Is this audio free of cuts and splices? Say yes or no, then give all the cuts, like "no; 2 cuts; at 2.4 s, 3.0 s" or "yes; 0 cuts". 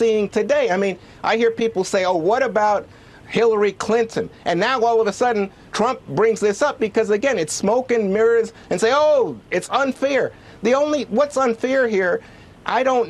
no; 1 cut; at 4.4 s